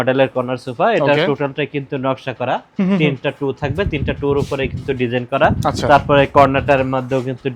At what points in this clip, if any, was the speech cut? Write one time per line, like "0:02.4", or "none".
none